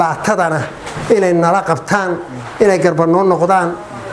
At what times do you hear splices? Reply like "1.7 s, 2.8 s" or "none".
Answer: none